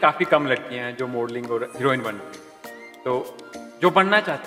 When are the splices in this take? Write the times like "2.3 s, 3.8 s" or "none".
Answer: none